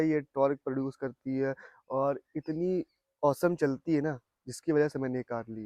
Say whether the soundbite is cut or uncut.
uncut